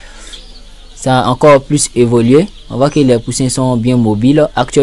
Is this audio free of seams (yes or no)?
yes